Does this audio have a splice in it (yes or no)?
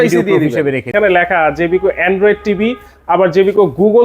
yes